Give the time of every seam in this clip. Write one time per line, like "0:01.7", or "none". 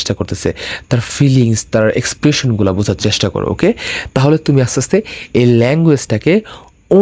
none